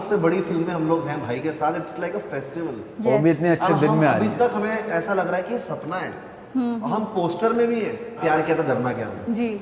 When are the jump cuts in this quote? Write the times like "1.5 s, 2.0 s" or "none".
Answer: 8.2 s